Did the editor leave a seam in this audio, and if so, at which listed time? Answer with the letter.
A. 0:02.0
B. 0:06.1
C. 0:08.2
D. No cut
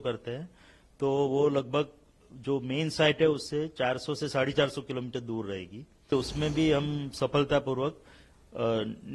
B